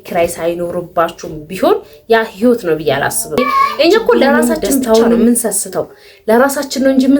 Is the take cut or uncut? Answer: cut